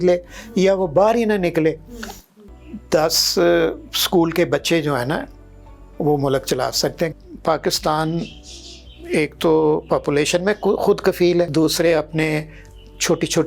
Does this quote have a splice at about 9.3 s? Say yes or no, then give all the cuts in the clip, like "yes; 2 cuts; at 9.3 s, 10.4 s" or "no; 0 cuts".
no; 3 cuts; at 2.4 s, 7.2 s, 11.5 s